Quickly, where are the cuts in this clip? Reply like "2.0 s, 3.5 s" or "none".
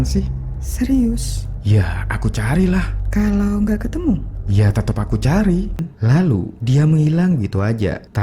5.8 s